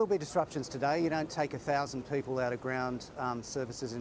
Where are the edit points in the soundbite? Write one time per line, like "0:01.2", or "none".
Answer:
none

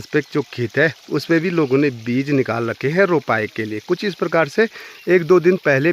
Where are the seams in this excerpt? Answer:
none

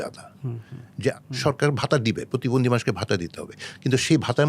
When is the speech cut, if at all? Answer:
0:01.1

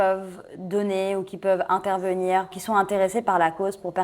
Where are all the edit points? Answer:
0:02.5

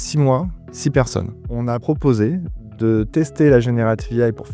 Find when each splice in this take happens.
0:01.8

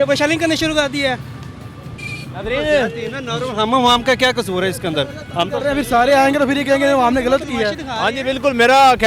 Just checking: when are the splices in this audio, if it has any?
none

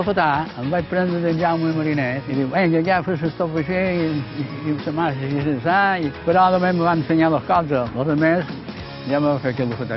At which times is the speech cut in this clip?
0:02.2
0:06.2

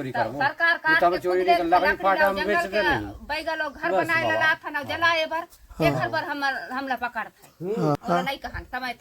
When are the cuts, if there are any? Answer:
0:08.0

